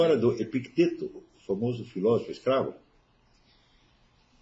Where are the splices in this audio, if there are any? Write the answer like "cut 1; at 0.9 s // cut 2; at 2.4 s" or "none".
none

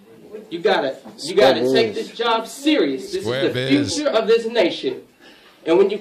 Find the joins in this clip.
cut 1; at 2.9 s

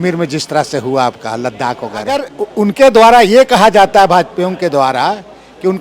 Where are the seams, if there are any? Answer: cut 1; at 2.4 s

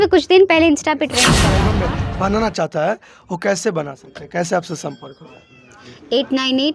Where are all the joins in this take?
cut 1; at 1.6 s // cut 2; at 5.8 s

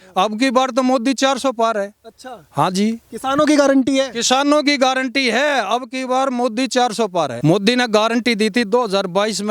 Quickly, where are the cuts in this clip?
cut 1; at 7.3 s

